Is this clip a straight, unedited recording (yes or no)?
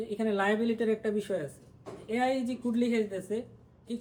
yes